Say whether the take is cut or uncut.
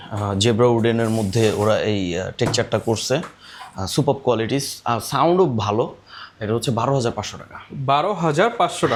uncut